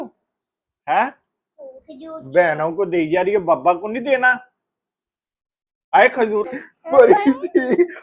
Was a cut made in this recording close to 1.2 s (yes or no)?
no